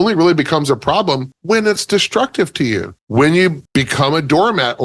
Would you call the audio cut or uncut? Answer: cut